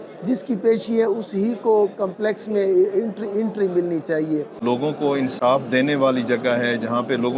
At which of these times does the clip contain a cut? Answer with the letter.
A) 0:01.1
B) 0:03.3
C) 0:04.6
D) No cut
C